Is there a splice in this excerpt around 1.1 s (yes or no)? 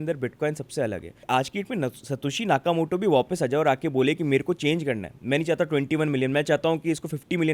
yes